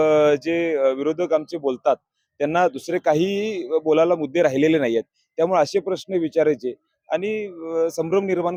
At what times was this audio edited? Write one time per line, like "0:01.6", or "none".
none